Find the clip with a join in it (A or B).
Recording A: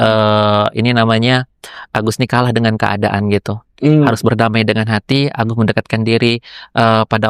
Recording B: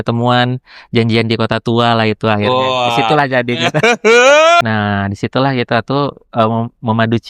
B